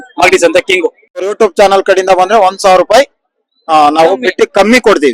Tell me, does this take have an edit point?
yes; 1 cut; at 1.2 s

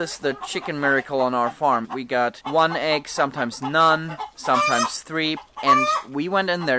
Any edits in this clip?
yes; 2 cuts; at 1.9 s, 5.4 s

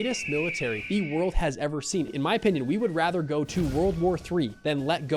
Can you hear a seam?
yes; 1 cut; at 2.1 s

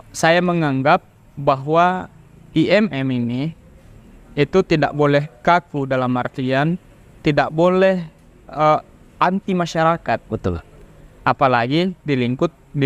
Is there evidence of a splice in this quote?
no; 0 cuts

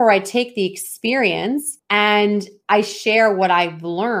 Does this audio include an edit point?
yes; 1 cut; at 1.8 s

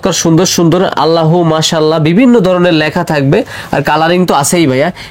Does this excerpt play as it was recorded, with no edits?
yes; 0 cuts

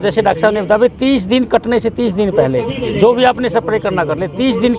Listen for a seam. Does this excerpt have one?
no; 0 cuts

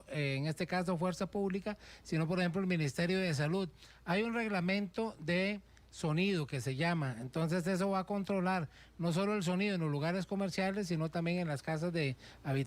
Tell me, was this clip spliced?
no; 0 cuts

